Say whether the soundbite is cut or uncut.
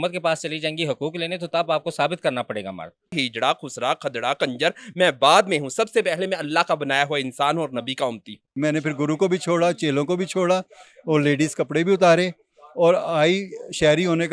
cut